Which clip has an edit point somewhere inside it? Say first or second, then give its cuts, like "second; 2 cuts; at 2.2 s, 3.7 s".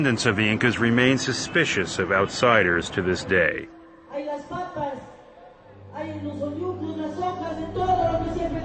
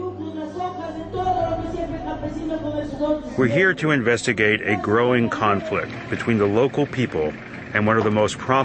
second; 1 cut; at 6.7 s